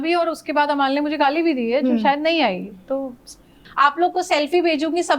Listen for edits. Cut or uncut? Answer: cut